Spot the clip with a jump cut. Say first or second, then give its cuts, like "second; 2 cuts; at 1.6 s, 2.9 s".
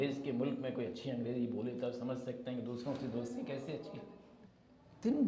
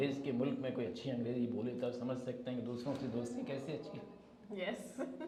first; 1 cut; at 4.3 s